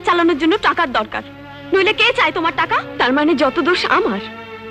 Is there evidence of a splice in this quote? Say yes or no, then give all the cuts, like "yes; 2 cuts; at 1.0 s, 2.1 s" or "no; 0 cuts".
yes; 1 cut; at 2.9 s